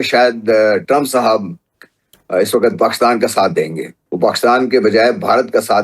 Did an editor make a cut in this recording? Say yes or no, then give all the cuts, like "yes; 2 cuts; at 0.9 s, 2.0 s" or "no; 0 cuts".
yes; 1 cut; at 3.9 s